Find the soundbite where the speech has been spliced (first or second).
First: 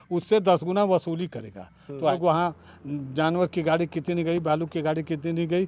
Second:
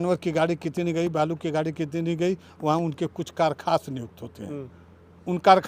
first